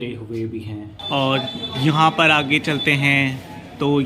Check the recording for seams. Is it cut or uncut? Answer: cut